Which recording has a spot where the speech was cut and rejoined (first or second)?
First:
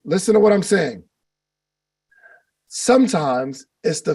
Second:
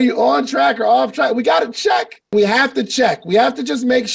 second